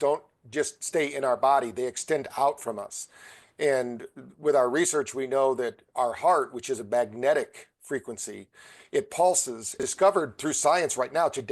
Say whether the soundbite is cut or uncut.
cut